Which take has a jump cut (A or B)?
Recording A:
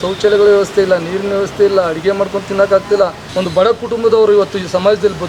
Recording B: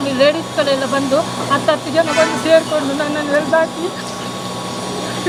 A